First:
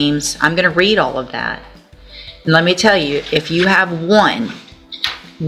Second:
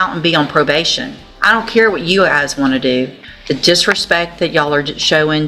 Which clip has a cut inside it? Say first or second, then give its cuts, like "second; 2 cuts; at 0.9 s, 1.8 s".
second; 1 cut; at 3.3 s